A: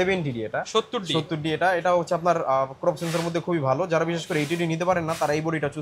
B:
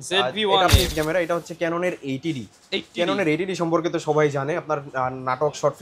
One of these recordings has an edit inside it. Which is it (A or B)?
B